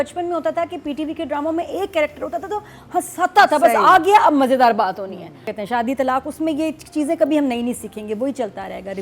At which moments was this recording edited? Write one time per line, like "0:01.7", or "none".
0:05.5